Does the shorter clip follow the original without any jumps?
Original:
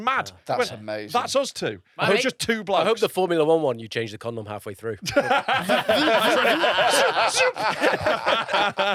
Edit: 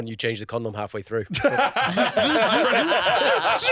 yes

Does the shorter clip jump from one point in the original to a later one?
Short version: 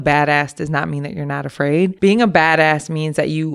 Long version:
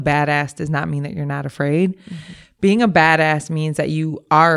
yes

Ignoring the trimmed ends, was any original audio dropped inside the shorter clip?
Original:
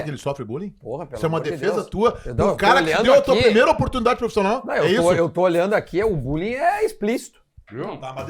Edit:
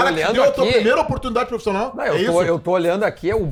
no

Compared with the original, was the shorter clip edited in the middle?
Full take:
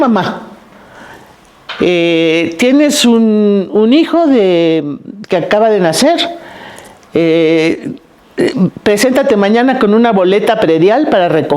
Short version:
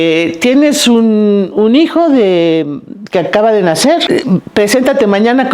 yes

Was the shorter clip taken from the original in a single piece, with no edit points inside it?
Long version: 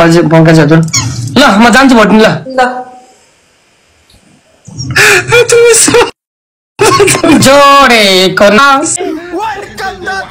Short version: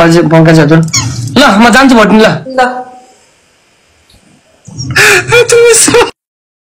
yes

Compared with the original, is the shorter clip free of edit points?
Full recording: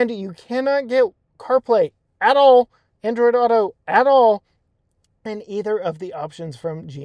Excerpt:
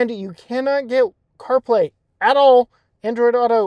yes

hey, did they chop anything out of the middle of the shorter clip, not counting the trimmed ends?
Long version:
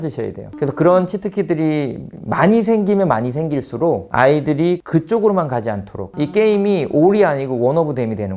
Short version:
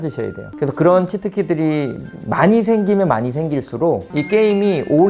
yes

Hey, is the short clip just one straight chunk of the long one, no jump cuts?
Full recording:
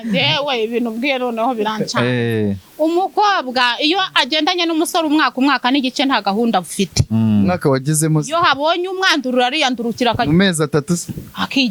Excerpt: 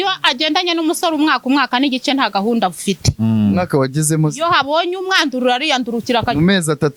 yes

